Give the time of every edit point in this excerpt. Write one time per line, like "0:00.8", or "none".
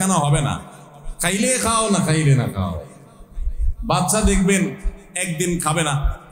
none

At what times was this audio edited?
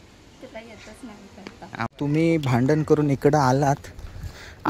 0:01.9

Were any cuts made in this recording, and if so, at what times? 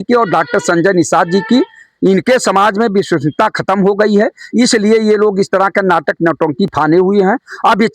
none

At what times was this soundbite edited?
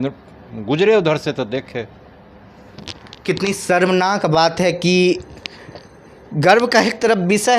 none

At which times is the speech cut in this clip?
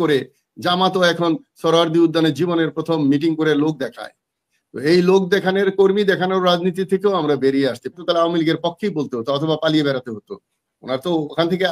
0:08.0

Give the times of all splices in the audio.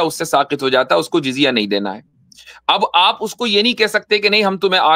none

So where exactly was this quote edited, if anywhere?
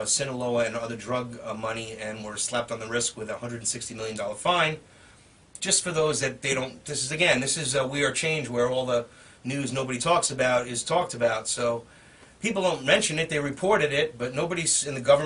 0:11.5

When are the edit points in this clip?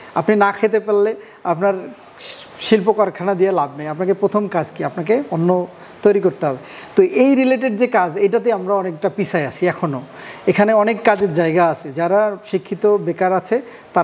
none

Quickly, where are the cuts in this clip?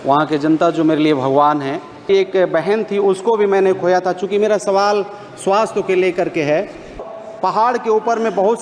0:02.1
0:07.0

